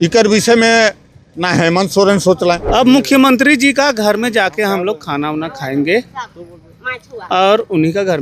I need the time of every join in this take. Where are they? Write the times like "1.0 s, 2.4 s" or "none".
2.6 s